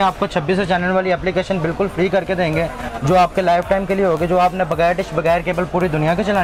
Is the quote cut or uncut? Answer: uncut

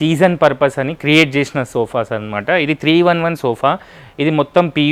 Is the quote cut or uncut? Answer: uncut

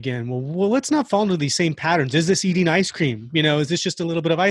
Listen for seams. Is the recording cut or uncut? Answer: uncut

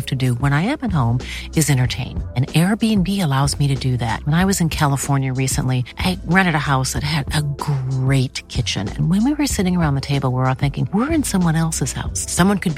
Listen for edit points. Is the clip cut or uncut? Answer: uncut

